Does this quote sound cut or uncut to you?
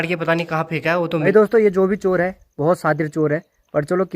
cut